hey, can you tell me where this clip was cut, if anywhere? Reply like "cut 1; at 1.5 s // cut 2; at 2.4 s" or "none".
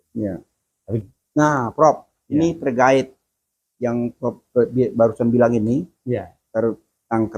cut 1; at 1.0 s